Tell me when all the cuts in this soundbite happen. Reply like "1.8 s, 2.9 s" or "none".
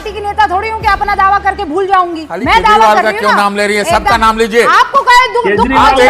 2.2 s